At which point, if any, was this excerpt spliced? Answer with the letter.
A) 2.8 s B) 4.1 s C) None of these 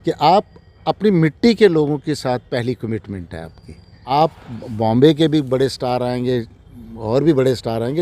B